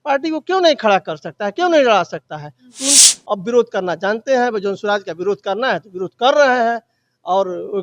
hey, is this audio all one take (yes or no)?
no